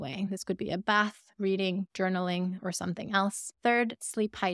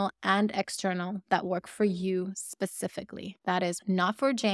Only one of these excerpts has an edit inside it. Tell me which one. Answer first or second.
first